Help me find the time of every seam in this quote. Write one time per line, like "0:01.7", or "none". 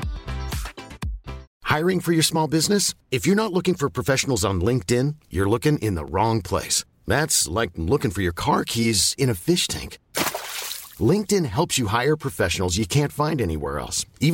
0:01.5